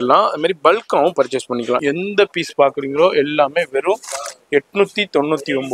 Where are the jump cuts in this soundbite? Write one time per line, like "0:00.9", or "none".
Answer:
0:01.8